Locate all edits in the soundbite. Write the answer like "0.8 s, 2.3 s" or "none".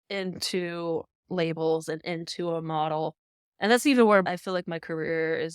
4.3 s